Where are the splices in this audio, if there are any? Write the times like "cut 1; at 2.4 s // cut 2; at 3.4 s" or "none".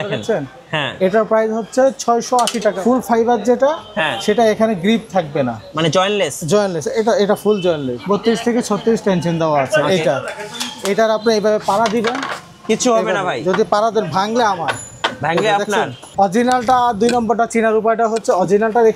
cut 1; at 2.8 s // cut 2; at 7.9 s // cut 3; at 16.1 s